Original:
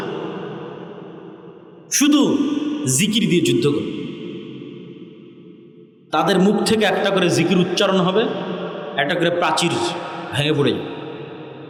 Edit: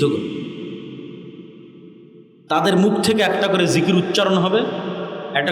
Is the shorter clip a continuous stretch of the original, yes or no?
yes